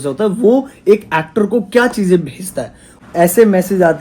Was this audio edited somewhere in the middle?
yes; 1 cut; at 2.9 s

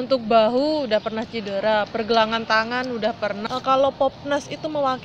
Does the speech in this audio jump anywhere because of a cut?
yes; 1 cut; at 3.4 s

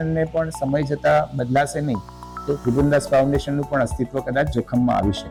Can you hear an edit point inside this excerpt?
no; 0 cuts

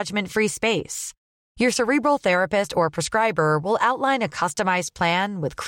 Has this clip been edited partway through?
no; 0 cuts

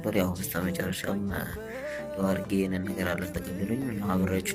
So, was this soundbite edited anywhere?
no; 0 cuts

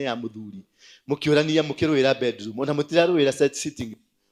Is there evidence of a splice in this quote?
no; 0 cuts

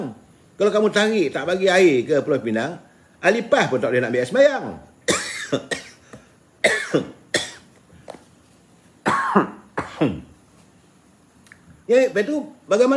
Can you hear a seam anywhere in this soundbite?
no; 0 cuts

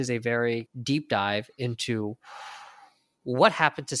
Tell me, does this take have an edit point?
no; 0 cuts

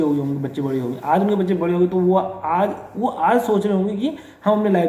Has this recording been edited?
no; 0 cuts

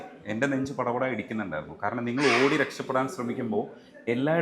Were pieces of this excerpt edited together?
no; 0 cuts

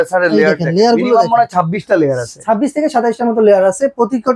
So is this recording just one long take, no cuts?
yes; 0 cuts

